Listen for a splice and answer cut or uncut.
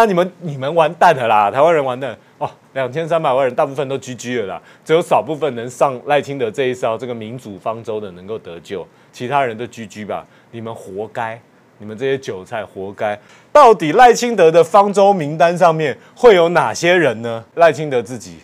cut